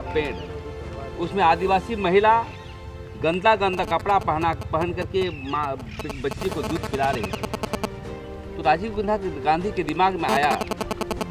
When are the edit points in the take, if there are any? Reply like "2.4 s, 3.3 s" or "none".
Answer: none